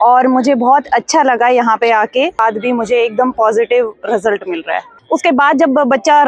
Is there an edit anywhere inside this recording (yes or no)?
yes